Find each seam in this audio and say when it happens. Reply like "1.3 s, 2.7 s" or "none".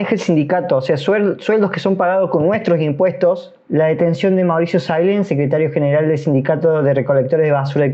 3.6 s